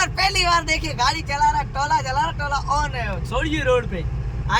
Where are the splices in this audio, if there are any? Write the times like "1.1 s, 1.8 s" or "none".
none